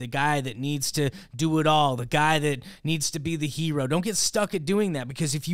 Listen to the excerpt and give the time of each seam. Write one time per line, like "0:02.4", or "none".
none